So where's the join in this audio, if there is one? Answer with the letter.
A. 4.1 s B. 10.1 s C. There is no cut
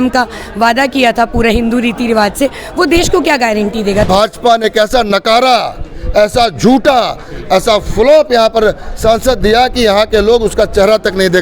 A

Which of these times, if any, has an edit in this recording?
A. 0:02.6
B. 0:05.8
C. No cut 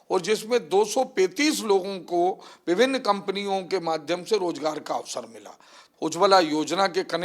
B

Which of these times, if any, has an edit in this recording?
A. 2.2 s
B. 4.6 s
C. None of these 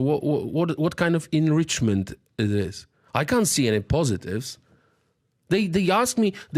C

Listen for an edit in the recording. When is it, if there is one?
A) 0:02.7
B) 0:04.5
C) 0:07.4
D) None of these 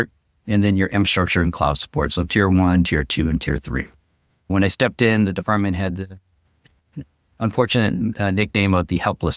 B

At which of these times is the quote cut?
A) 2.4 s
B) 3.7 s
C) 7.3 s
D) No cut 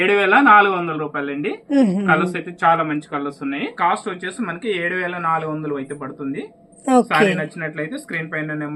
B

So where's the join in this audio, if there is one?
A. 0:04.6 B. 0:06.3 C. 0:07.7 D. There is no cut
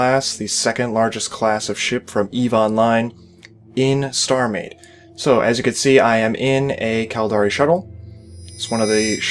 C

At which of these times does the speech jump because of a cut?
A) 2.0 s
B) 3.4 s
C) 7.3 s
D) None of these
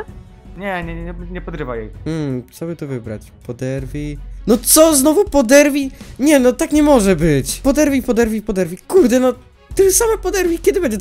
D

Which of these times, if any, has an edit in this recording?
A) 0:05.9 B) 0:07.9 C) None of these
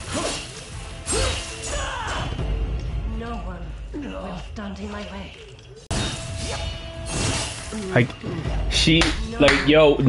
A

